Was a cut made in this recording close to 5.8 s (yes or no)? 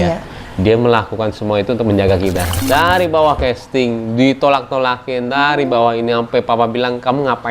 no